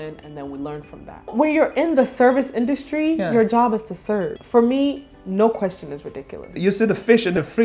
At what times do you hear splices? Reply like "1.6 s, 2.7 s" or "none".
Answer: 1.3 s, 4.4 s, 6.5 s